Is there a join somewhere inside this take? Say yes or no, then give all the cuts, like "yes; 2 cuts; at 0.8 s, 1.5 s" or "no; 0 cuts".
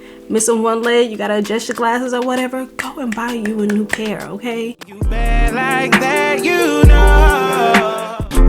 yes; 1 cut; at 5.1 s